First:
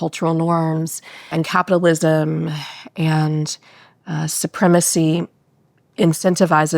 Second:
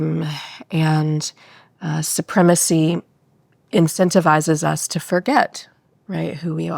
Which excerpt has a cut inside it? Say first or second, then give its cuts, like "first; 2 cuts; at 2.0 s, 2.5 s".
first; 1 cut; at 1.3 s